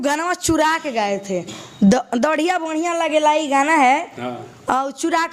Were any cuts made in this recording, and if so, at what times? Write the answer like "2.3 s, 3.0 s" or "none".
none